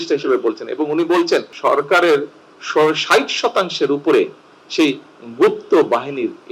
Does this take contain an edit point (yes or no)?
yes